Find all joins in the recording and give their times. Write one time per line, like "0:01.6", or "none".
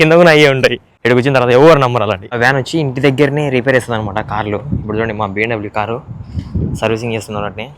0:00.9
0:02.3

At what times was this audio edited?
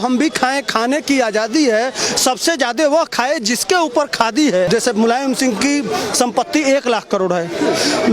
0:04.7

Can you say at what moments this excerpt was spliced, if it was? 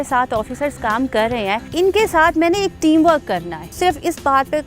0:01.7
0:03.7

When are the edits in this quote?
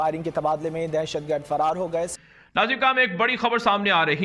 0:02.3

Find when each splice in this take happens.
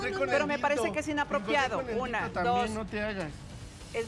none

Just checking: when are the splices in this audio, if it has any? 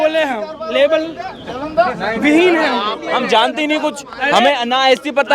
0:03.0

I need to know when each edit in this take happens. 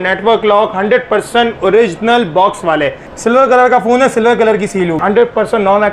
0:03.0
0:05.0

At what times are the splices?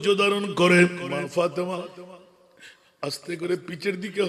0:01.0

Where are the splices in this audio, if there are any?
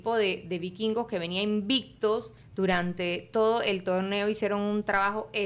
0:02.4

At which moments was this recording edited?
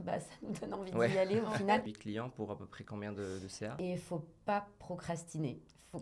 0:01.9
0:03.8

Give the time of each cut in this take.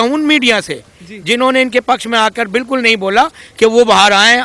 none

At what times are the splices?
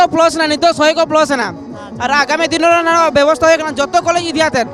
none

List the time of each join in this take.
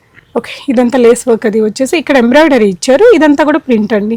none

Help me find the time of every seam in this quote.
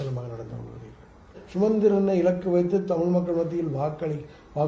0:01.4

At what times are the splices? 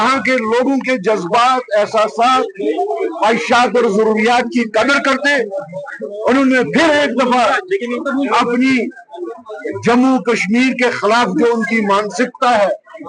none

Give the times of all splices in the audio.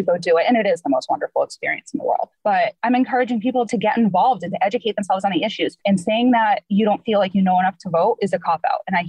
0:02.5
0:03.7
0:05.8
0:06.6

